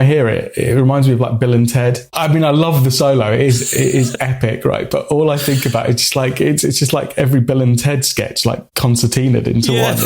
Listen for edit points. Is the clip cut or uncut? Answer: cut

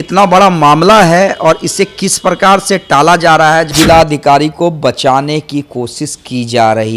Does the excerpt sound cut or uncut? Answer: cut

